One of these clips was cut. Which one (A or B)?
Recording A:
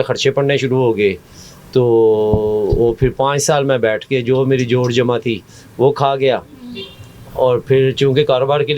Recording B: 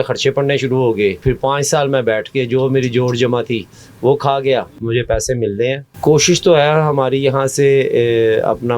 B